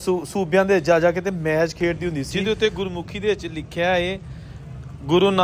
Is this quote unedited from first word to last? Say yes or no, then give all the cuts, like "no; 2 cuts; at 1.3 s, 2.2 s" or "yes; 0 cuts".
no; 1 cut; at 2.3 s